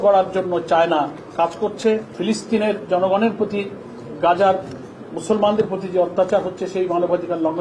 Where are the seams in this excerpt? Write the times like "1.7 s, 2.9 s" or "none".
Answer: 2.1 s